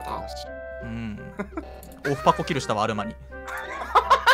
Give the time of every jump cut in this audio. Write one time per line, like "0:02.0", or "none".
none